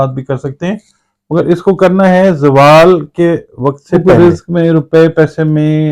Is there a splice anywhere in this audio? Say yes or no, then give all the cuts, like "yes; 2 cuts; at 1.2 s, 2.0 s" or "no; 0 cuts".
yes; 1 cut; at 4.0 s